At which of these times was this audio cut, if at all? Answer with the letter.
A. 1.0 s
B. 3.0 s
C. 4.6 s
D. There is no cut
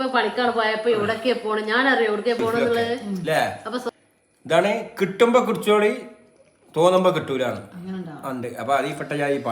B